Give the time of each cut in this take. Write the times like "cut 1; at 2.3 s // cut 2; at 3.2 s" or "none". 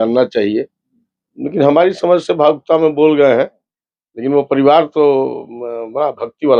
none